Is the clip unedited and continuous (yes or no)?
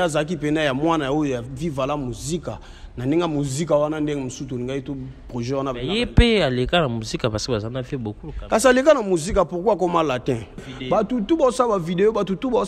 no